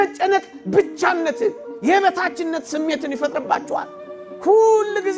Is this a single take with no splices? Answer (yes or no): no